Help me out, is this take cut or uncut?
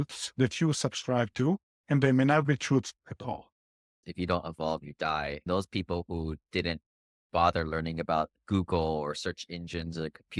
cut